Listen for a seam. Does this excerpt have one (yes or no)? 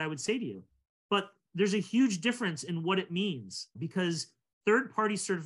yes